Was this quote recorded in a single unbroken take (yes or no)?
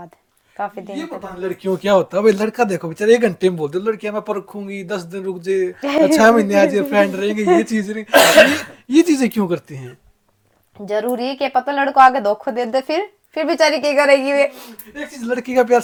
yes